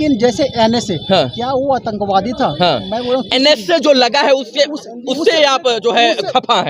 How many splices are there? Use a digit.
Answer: 0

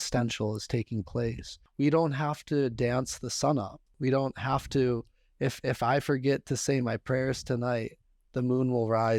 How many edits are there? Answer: 2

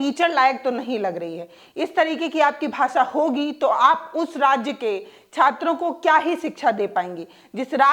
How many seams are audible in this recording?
0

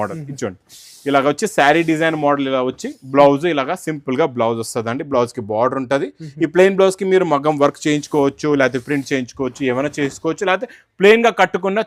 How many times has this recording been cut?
0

